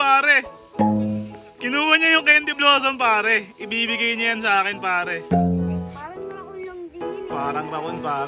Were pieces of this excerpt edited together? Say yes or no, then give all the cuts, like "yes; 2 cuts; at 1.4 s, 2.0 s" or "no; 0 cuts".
no; 0 cuts